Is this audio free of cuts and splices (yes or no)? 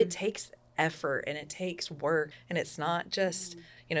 no